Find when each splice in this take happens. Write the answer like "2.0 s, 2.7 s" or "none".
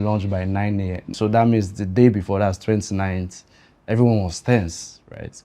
1.1 s